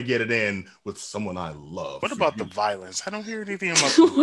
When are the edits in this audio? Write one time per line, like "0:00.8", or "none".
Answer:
0:02.0

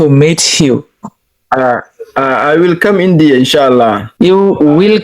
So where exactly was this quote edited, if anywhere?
0:04.0

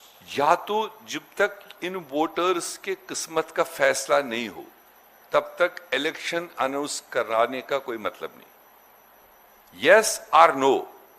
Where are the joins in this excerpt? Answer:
none

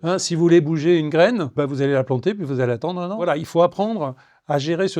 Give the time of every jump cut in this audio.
0:01.5
0:03.3

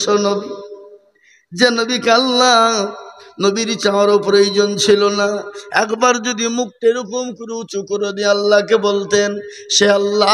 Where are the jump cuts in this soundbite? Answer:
none

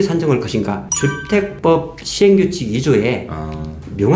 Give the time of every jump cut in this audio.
0:01.4

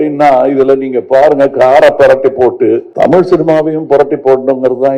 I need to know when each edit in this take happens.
0:02.9

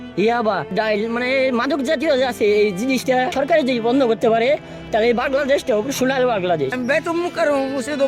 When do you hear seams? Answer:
0:03.3
0:06.7

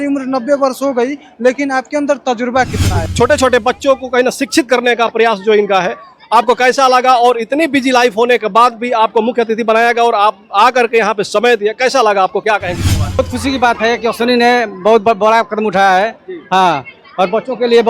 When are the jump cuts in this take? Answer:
0:03.0
0:13.2

